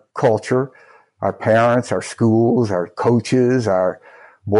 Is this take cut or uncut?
uncut